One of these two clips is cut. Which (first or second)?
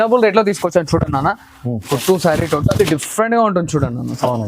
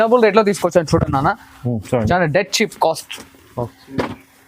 first